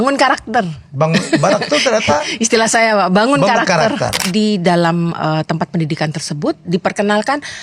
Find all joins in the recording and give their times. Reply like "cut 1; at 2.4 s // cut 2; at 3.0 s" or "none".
cut 1; at 4.2 s